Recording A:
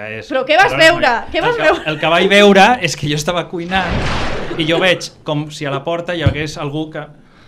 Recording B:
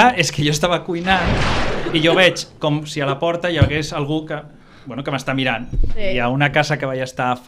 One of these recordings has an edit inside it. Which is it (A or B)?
B